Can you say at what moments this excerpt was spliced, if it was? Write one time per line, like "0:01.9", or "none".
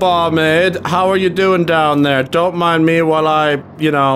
none

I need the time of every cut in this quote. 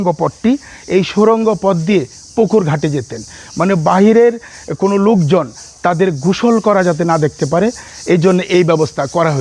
none

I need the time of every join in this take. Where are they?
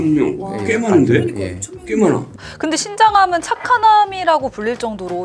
0:02.3

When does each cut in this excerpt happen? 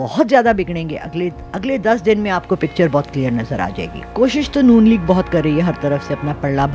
0:04.1

